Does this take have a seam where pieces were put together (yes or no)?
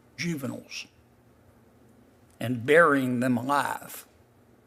no